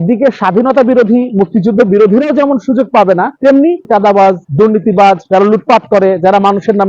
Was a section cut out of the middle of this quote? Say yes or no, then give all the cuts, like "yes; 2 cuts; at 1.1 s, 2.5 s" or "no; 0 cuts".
yes; 1 cut; at 3.8 s